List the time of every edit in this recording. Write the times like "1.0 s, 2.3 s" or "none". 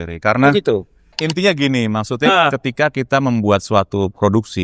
1.2 s